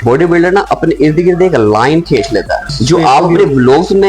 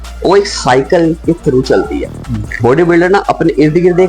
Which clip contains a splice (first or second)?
first